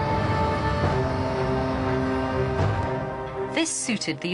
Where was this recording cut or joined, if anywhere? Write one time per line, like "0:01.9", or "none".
0:01.2